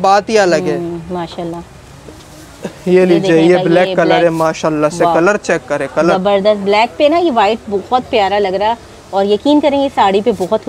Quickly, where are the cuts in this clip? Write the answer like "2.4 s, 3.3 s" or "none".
none